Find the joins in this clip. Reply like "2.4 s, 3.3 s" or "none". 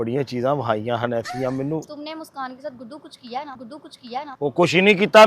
4.3 s